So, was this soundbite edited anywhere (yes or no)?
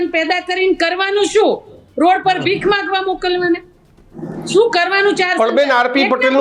no